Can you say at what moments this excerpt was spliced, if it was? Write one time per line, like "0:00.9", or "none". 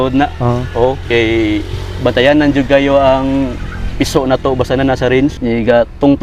none